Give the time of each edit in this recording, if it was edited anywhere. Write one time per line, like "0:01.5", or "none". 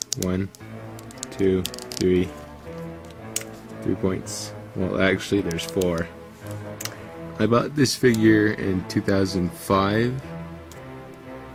none